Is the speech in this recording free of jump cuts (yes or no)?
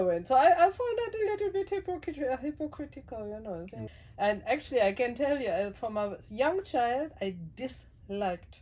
no